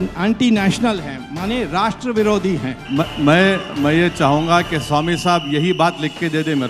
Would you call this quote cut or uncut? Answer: uncut